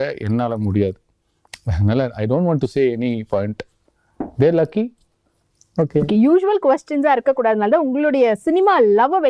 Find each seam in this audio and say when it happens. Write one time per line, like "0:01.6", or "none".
none